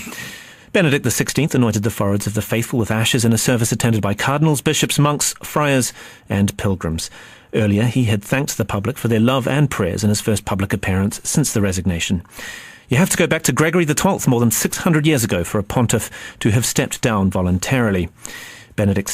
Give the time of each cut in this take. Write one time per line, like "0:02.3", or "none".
0:02.5